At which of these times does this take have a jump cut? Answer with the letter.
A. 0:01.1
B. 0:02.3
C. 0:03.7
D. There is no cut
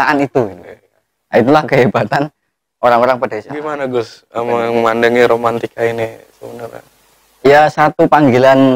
C